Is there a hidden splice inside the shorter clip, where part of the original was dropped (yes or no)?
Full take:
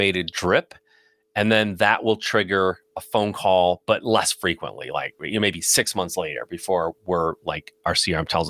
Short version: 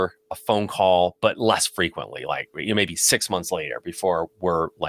no